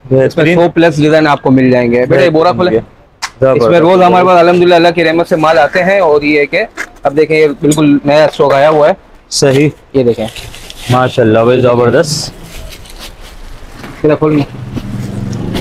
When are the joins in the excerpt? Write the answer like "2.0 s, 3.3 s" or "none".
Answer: none

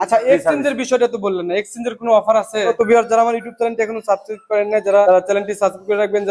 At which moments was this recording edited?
2.7 s, 5.1 s

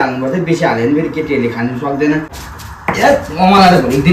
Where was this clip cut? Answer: 2.4 s

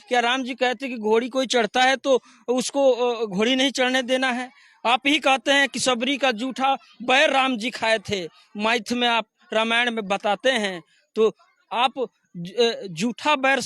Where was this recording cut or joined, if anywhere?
none

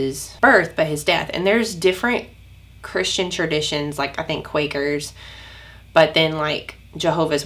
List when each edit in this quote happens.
none

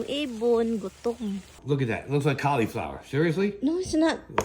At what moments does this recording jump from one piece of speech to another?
1.5 s

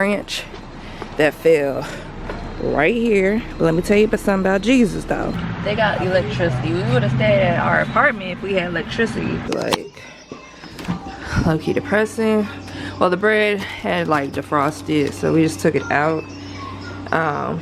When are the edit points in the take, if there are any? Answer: 5.4 s, 9.5 s

